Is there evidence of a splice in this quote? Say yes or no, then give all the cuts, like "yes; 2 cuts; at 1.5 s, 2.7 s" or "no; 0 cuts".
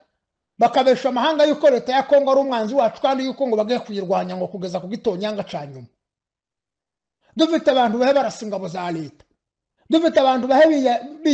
no; 0 cuts